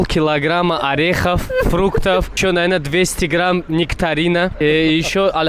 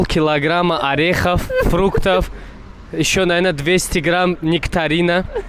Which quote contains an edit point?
first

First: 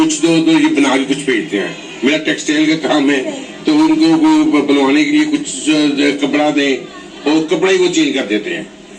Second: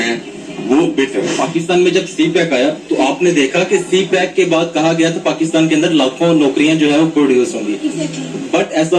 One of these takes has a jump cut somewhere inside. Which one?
second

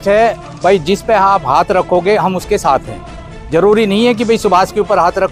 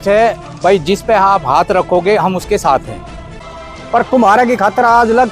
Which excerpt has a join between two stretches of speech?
second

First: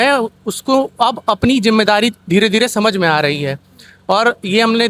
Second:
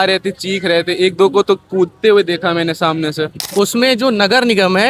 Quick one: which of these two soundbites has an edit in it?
second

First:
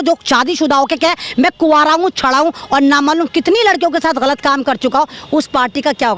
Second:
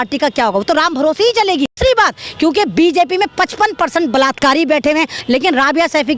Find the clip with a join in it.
second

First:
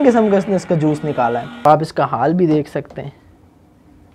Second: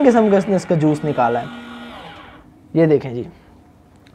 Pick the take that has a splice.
first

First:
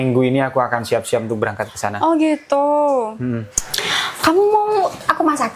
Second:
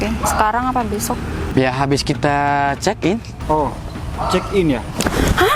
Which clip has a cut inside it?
second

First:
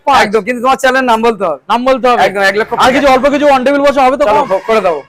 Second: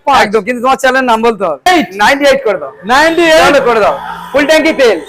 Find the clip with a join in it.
second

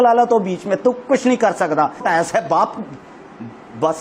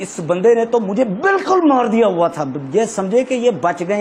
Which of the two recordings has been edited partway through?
first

